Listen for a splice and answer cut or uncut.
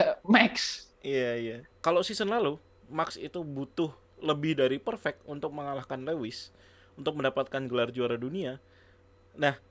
cut